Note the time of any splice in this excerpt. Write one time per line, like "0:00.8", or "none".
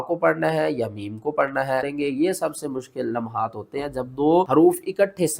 0:01.9
0:04.5